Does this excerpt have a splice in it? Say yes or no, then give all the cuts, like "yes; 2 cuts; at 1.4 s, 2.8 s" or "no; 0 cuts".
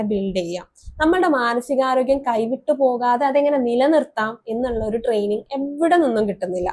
no; 0 cuts